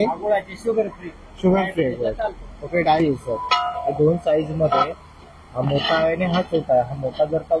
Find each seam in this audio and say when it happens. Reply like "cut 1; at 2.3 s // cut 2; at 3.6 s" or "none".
cut 1; at 3.0 s